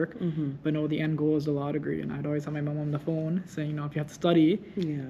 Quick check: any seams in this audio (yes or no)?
no